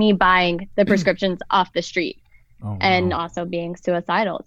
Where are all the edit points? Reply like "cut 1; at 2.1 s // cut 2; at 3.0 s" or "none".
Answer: none